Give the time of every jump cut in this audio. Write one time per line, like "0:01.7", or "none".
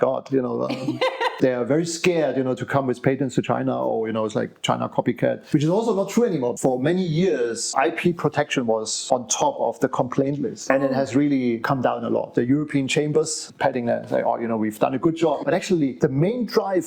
0:01.3
0:06.5
0:12.3
0:13.4
0:15.4